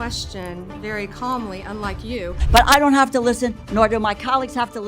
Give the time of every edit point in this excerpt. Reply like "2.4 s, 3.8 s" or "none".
2.4 s